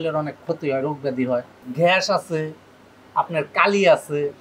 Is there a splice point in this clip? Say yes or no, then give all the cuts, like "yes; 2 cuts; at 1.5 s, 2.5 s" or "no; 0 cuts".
no; 0 cuts